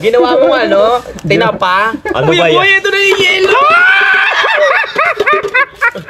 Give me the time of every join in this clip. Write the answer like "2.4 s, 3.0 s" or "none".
none